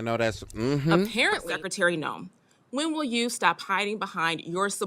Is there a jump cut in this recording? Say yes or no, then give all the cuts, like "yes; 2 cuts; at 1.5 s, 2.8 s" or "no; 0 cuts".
yes; 1 cut; at 1.6 s